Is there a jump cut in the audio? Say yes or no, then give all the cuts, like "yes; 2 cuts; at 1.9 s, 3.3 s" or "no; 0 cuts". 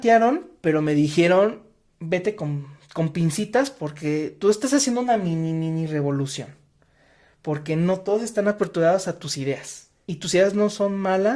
no; 0 cuts